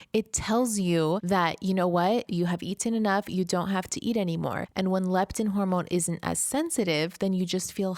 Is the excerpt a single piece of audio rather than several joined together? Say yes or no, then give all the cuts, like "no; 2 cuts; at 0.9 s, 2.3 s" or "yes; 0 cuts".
no; 2 cuts; at 1.2 s, 4.6 s